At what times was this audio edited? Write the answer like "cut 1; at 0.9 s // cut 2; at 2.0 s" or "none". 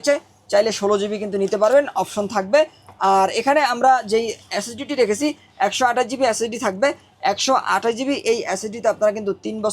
none